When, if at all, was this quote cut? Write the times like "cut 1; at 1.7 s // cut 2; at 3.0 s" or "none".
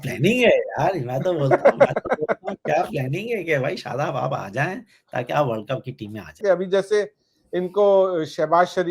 cut 1; at 6.4 s